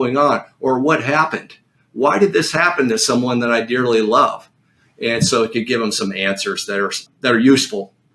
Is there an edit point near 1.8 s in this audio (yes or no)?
no